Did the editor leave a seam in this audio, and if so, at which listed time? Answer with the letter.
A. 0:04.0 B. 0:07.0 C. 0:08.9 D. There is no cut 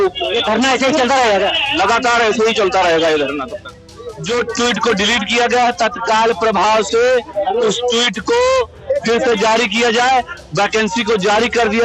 A